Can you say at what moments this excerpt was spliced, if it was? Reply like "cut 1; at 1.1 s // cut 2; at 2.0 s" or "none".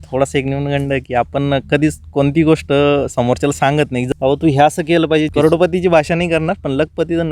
cut 1; at 4.1 s // cut 2; at 5.3 s